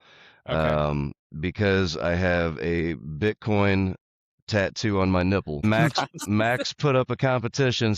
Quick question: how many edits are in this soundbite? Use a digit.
1